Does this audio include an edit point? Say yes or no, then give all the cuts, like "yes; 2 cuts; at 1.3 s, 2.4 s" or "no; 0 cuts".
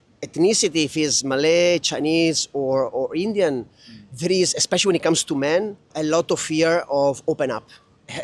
no; 0 cuts